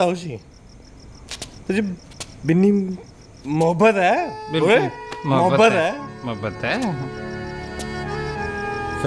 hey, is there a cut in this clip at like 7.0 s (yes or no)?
no